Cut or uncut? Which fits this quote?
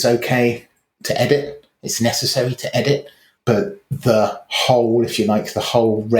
uncut